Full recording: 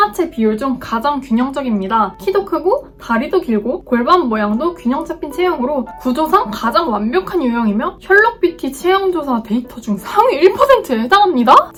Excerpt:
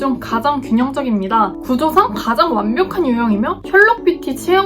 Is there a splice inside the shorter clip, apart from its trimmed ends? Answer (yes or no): yes